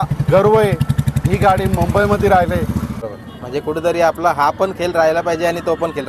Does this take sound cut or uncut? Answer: cut